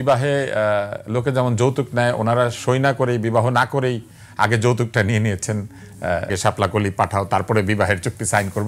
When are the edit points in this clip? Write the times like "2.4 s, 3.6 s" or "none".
6.3 s